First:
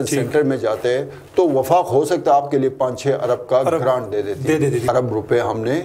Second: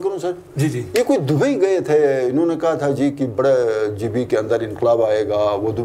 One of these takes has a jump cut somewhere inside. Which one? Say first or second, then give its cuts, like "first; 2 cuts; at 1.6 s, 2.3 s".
first; 1 cut; at 4.9 s